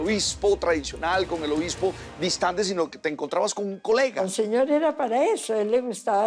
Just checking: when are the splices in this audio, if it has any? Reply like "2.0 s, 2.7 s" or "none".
4.2 s